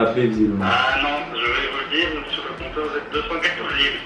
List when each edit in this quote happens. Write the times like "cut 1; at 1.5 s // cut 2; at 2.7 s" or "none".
none